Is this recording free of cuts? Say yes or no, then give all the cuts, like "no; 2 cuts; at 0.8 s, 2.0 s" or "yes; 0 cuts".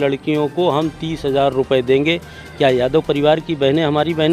yes; 0 cuts